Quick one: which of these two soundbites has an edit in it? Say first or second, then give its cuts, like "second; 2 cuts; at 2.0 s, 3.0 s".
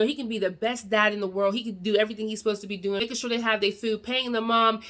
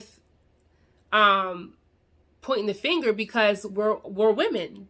first; 1 cut; at 3.0 s